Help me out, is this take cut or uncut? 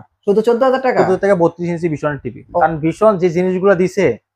cut